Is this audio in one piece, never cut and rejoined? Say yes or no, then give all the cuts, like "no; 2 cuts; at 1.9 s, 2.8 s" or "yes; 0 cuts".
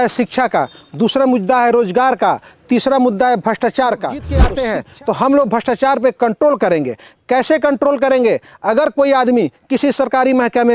no; 1 cut; at 4.4 s